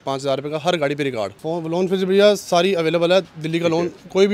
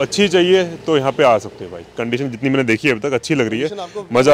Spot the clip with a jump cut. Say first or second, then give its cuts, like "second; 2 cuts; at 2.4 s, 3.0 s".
first; 1 cut; at 1.4 s